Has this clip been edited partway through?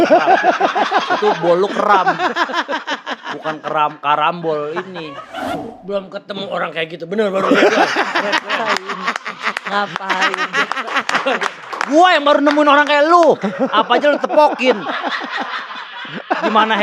yes; 2 cuts; at 5.6 s, 11.7 s

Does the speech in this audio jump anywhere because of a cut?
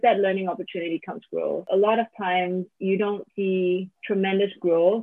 yes; 3 cuts; at 1.6 s, 2.7 s, 3.4 s

